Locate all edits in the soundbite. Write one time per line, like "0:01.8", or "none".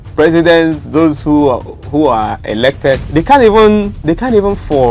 0:03.0
0:03.9